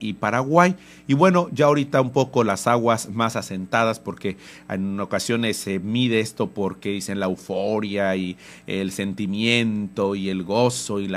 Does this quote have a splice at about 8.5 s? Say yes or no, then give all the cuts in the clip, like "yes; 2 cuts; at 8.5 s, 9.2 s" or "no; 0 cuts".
no; 0 cuts